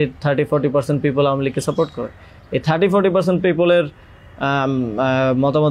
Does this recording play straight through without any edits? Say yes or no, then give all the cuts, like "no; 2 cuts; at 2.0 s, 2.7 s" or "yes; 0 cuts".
yes; 0 cuts